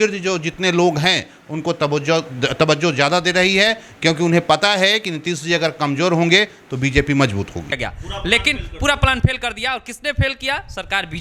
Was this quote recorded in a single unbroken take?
no; 1 cut; at 7.7 s

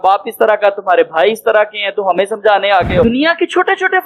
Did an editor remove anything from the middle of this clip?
yes; 1 cut; at 3.0 s

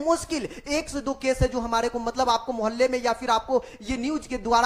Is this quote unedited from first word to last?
yes; 0 cuts

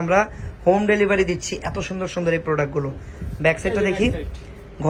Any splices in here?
no; 0 cuts

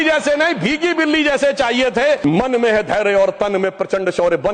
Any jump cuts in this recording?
yes; 1 cut; at 2.3 s

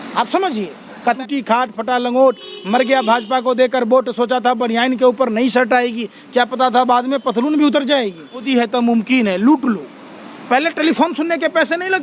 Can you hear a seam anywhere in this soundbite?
yes; 2 cuts; at 1.2 s, 8.5 s

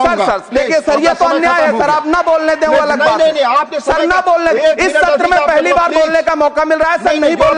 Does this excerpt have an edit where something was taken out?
no; 0 cuts

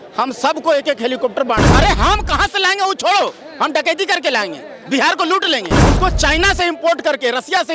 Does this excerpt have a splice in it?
yes; 2 cuts; at 1.6 s, 5.7 s

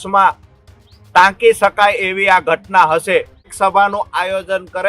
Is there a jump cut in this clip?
yes; 1 cut; at 3.5 s

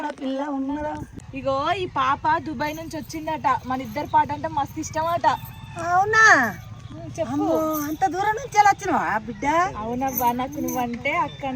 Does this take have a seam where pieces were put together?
yes; 1 cut; at 1.2 s

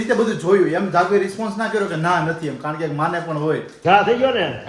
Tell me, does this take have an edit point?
yes; 1 cut; at 3.7 s

